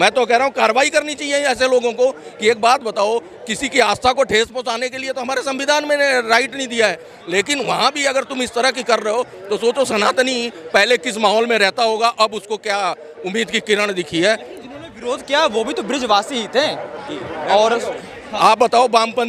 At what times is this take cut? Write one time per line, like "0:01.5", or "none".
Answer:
none

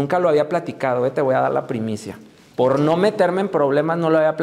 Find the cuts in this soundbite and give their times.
none

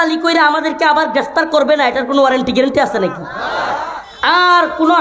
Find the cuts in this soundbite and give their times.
0:03.8

